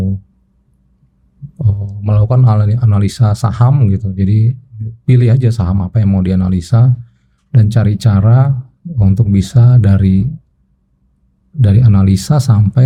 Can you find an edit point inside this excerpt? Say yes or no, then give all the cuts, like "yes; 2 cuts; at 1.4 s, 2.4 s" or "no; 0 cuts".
no; 0 cuts